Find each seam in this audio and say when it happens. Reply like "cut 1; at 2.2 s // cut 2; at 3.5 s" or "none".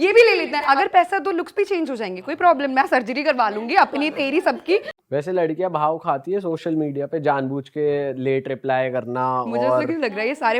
cut 1; at 4.9 s